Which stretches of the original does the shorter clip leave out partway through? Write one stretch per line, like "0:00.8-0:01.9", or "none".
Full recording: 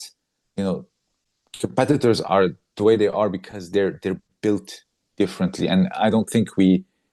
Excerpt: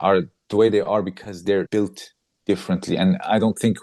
0:03.9-0:04.4